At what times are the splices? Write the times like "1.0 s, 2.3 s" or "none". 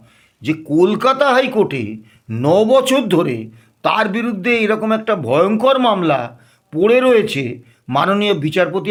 none